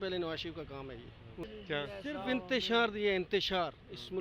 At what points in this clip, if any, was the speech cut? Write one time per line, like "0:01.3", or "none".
0:01.4